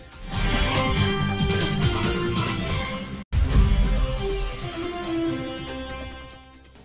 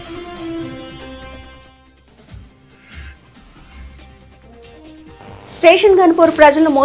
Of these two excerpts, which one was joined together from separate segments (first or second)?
second